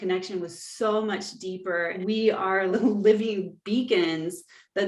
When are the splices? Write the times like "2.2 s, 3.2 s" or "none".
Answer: 2.0 s, 2.7 s